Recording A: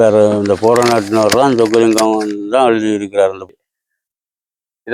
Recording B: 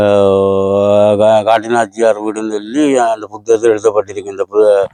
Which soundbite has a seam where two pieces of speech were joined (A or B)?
A